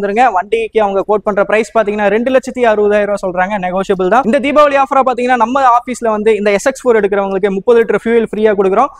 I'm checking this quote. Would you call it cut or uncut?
cut